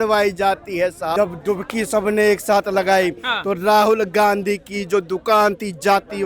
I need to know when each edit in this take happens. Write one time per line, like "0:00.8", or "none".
0:01.1